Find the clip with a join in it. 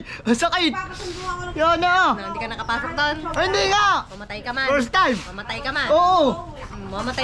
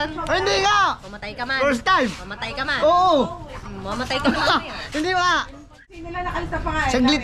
second; 1 cut; at 6.1 s

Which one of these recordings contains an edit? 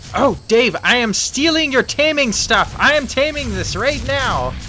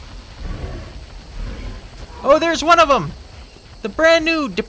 second; 1 cut; at 2.2 s

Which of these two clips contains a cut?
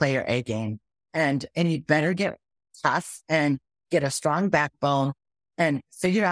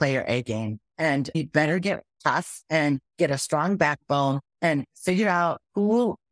second; 4 cuts; at 1.1 s, 2.1 s, 3.1 s, 4.5 s

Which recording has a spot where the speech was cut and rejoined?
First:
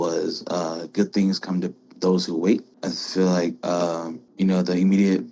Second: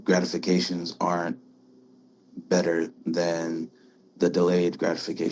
first; 2 cuts; at 2.7 s, 4.2 s

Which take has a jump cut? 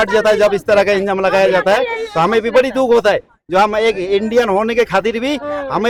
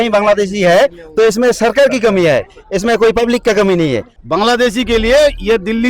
second; 1 cut; at 4.1 s

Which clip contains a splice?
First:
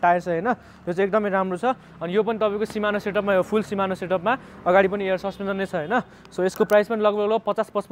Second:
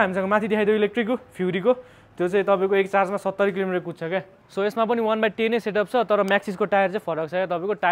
second; 1 cut; at 4.5 s

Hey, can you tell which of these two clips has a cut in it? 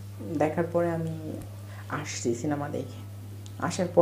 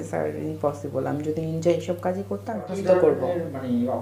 second; 1 cut; at 2.7 s

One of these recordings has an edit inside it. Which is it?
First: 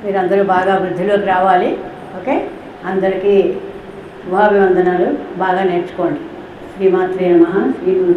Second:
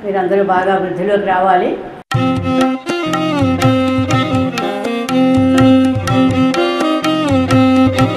second; 1 cut; at 2.0 s

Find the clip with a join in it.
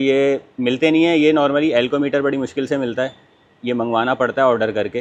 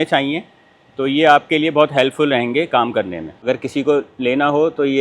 second; 1 cut; at 3.5 s

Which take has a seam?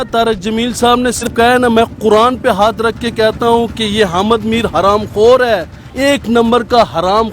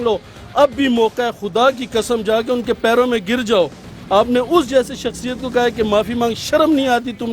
first; 1 cut; at 1.3 s

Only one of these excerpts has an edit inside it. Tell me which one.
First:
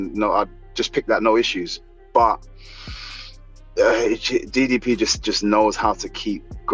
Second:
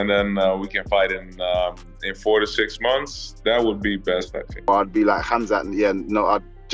second; 1 cut; at 4.7 s

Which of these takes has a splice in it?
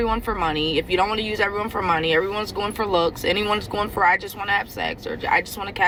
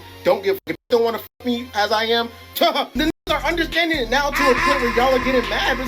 second; 1 cut; at 2.9 s

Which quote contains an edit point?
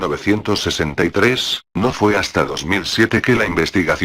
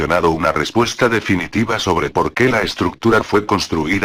first; 1 cut; at 0.9 s

